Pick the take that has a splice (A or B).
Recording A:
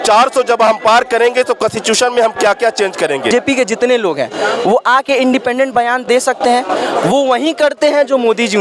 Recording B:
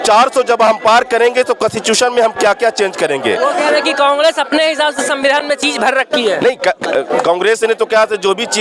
A